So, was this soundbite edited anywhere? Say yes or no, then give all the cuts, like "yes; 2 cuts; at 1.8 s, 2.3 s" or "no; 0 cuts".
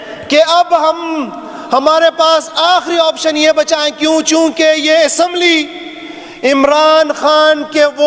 no; 0 cuts